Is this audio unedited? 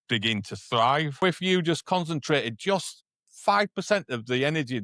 no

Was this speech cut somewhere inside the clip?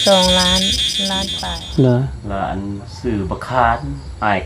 yes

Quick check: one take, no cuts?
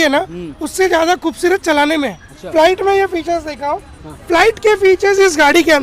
no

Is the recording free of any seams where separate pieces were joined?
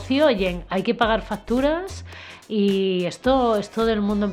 yes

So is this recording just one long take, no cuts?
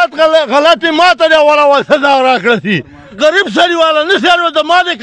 no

